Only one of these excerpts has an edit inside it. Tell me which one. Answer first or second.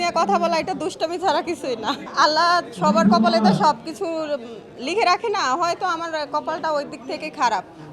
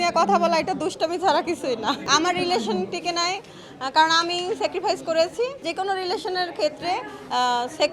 second